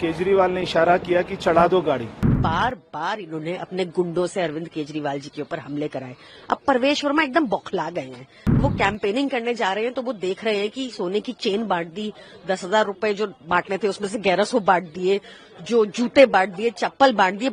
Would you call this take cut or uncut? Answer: cut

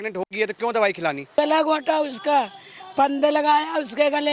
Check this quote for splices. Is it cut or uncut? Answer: cut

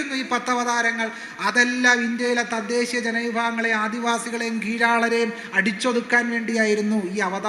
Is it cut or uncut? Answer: uncut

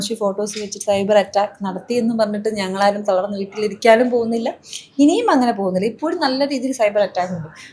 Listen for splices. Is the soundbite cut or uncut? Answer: uncut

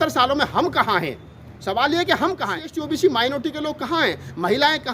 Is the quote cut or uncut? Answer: cut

